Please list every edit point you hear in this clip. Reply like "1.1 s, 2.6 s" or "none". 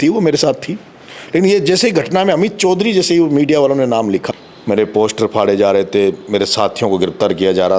4.2 s